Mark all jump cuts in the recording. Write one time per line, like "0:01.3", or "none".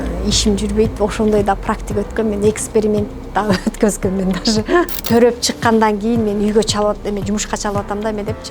0:05.0

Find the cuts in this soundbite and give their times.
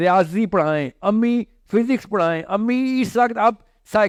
none

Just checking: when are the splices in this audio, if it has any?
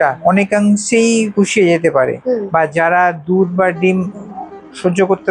0:02.2

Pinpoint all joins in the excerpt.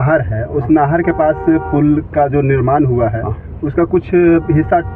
none

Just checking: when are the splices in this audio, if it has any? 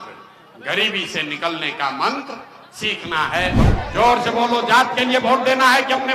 0:03.6

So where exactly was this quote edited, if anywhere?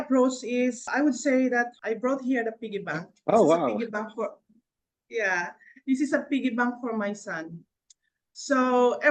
0:00.9
0:01.8
0:03.0

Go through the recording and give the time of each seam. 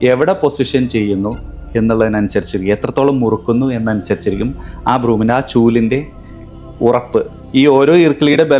0:07.4

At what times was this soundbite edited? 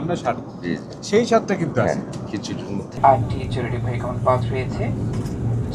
0:03.0

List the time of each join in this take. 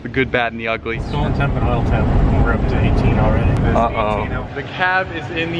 0:01.0
0:03.6
0:04.5

